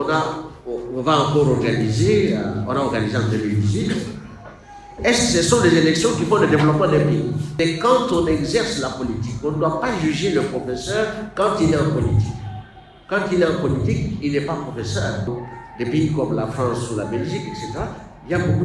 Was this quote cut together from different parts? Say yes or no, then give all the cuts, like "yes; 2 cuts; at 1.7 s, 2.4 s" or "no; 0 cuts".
yes; 2 cuts; at 7.5 s, 15.3 s